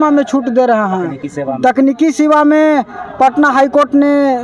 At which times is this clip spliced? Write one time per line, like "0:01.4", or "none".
none